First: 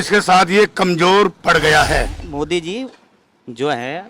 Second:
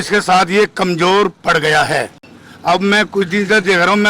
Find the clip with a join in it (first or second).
first